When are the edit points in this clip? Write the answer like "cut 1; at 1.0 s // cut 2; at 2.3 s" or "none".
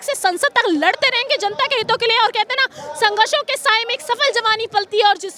none